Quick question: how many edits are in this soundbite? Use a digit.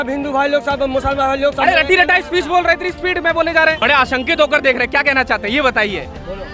2